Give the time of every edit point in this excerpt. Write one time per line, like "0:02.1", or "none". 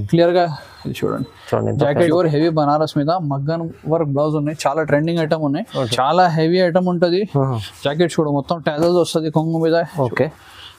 0:02.1
0:05.8